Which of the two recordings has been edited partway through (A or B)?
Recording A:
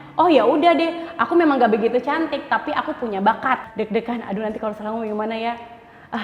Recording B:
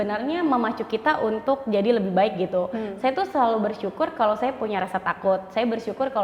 A